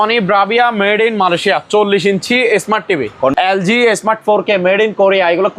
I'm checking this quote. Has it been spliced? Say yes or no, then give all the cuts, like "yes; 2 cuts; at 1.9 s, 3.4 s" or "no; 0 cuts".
yes; 1 cut; at 3.3 s